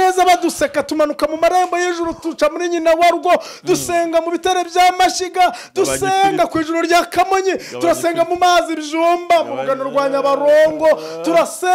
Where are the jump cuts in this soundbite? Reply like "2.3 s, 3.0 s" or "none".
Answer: none